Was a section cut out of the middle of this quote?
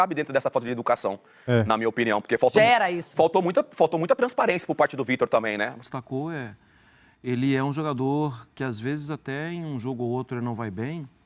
yes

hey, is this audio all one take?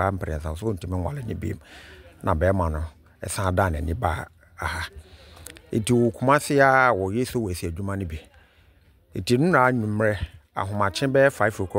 yes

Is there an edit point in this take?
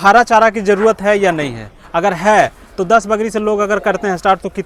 no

